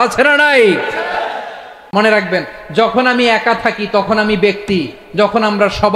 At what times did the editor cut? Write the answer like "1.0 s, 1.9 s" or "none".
1.9 s